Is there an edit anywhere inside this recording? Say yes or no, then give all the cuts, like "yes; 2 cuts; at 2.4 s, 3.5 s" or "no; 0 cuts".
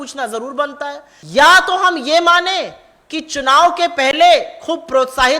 yes; 1 cut; at 1.1 s